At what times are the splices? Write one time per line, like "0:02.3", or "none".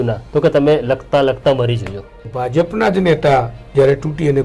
0:02.3